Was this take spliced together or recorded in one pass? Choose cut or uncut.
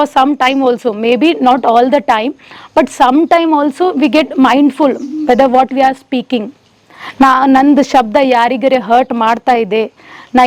uncut